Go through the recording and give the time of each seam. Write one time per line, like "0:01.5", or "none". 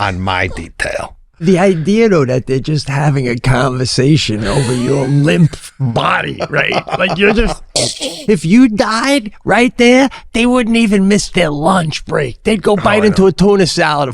0:01.4
0:08.2